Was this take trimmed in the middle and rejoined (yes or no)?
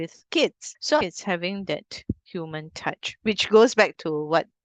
yes